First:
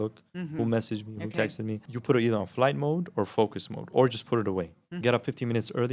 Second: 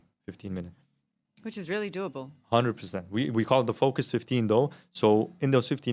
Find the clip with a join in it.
first; 2 cuts; at 1.9 s, 5.0 s

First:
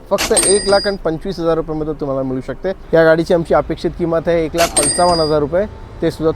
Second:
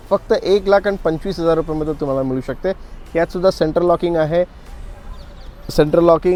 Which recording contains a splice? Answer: first; 1 cut; at 2.7 s

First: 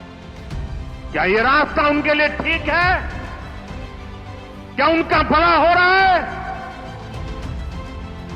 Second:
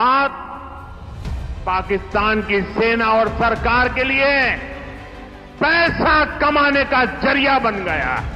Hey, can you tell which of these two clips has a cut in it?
first; 3 cuts; at 1.1 s, 3.1 s, 4.7 s

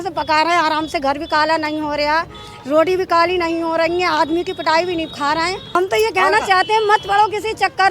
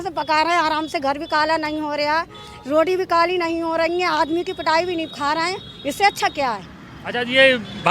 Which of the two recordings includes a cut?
first; 1 cut; at 5.8 s

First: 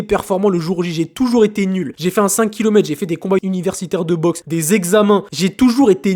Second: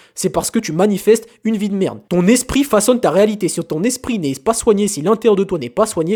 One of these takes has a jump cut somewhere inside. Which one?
first; 4 cuts; at 1.9 s, 3.4 s, 4.4 s, 5.3 s

